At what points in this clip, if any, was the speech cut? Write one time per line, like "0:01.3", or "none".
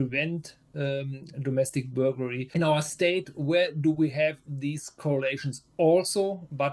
0:02.4